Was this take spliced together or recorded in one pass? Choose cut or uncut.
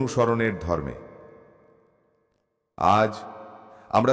uncut